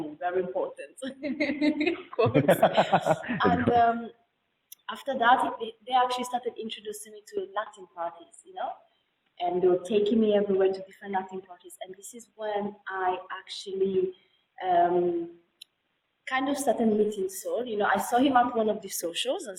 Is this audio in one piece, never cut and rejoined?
yes; 0 cuts

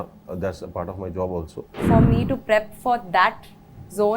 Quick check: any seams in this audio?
yes; 1 cut; at 1.8 s

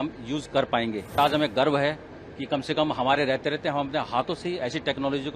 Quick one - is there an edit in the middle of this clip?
yes; 1 cut; at 1.2 s

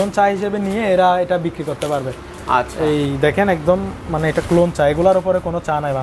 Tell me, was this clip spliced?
no; 0 cuts

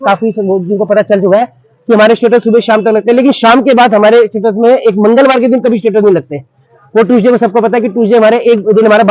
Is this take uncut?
yes; 0 cuts

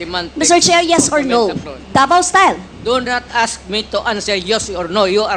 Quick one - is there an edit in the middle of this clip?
no; 0 cuts

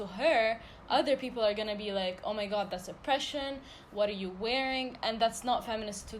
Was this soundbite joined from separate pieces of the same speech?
no; 0 cuts

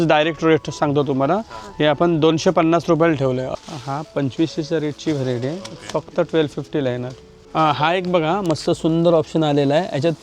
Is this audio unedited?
no; 1 cut; at 3.5 s

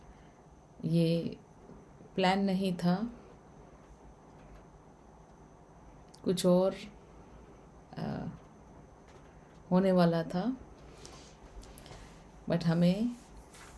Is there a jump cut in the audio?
no; 0 cuts

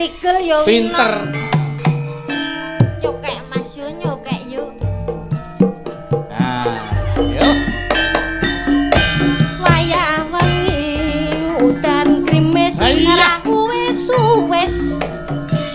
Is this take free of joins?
no; 1 cut; at 1.4 s

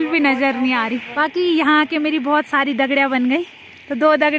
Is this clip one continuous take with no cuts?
no; 1 cut; at 1.1 s

